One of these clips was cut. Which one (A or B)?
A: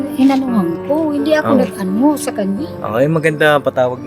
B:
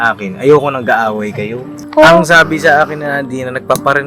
B